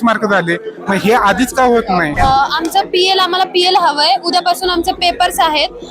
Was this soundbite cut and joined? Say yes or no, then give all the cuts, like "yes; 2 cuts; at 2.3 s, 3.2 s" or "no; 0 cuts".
yes; 1 cut; at 2.1 s